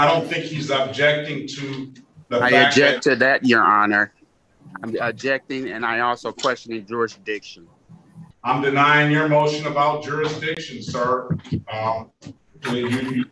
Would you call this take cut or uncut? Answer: cut